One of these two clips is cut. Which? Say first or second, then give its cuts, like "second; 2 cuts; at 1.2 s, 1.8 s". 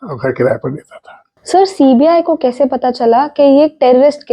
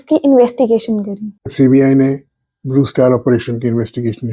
second; 1 cut; at 1.5 s